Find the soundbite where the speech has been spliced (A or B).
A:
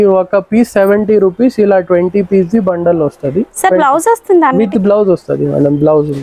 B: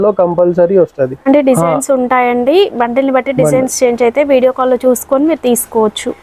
B